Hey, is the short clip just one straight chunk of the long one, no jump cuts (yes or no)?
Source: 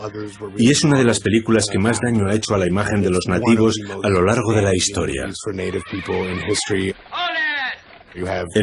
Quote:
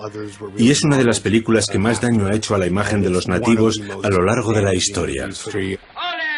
no